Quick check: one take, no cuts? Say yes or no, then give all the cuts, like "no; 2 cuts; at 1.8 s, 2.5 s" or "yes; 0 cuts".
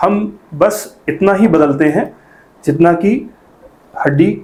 yes; 0 cuts